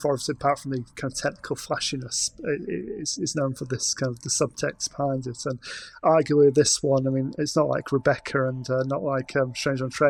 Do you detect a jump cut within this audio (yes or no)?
no